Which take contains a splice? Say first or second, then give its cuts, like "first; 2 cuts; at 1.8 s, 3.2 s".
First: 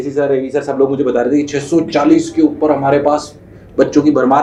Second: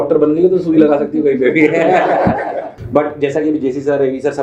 second; 1 cut; at 2.7 s